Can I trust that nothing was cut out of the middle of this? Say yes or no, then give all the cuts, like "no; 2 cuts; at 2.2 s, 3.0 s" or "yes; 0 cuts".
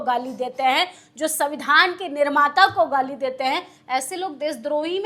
yes; 0 cuts